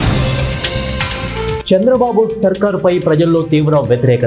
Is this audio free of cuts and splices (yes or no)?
no